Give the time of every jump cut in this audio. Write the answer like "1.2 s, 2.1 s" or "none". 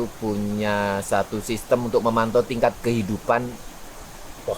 none

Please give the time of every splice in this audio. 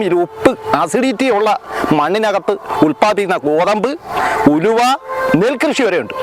none

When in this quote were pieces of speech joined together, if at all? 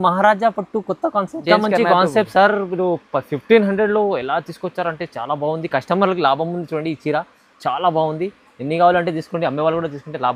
none

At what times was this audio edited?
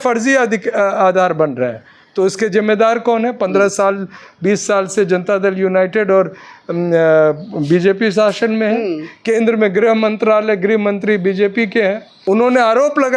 12.1 s

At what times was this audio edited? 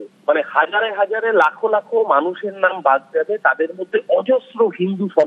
none

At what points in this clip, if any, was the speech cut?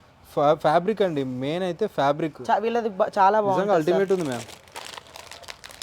none

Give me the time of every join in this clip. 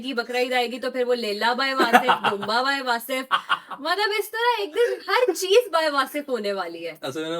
none

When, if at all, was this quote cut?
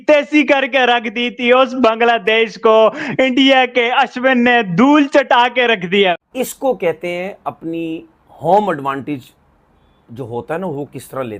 6.2 s

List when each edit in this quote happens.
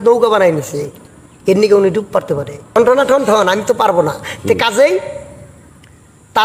2.8 s

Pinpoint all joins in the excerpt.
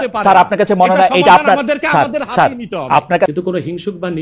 3.3 s

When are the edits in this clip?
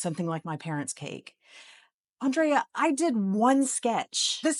none

